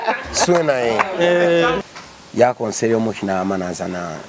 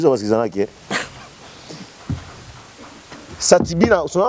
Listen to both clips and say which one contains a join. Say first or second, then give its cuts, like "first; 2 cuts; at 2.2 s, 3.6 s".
first; 1 cut; at 1.8 s